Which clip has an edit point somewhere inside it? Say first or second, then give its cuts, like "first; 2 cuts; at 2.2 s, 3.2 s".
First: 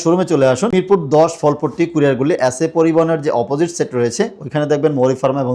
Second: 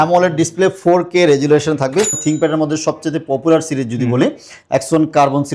second; 1 cut; at 2.2 s